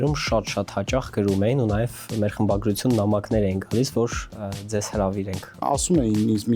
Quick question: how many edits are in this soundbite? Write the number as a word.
two